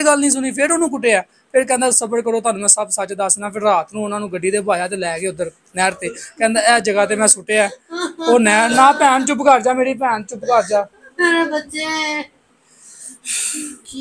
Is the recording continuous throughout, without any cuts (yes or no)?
yes